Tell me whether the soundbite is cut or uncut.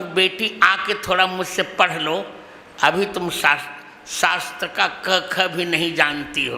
uncut